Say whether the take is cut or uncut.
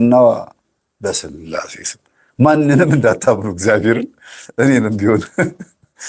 uncut